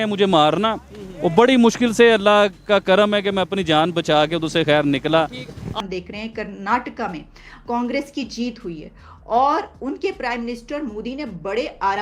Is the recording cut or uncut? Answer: cut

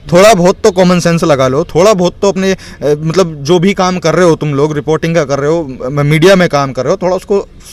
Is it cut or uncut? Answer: uncut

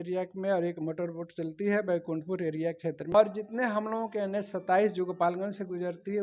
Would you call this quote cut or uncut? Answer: cut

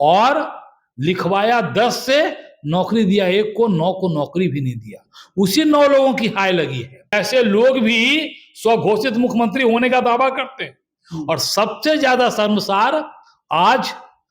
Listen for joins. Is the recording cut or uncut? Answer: cut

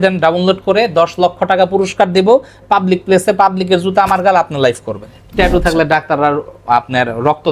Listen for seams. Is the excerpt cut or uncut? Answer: cut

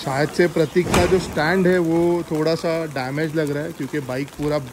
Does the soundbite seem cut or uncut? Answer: uncut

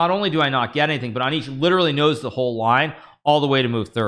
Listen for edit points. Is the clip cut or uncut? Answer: uncut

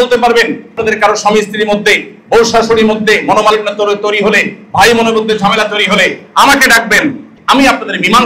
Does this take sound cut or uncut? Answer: cut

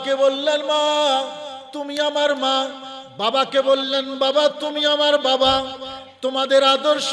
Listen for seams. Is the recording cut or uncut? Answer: uncut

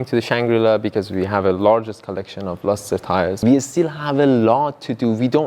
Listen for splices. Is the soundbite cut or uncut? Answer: cut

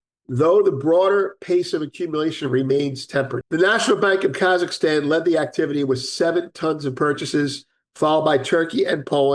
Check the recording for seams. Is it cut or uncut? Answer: cut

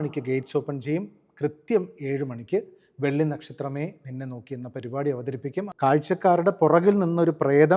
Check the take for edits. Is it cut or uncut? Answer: cut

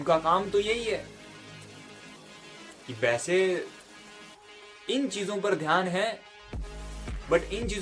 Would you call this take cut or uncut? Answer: uncut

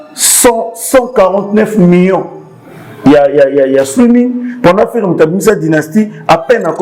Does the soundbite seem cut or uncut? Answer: uncut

